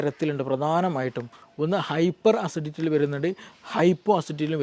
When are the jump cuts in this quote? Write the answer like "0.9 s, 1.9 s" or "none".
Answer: none